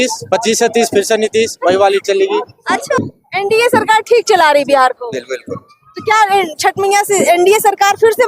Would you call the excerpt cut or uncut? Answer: cut